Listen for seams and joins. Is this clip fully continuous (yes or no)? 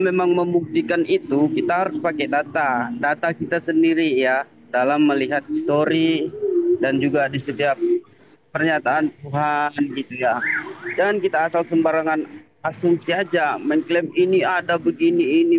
yes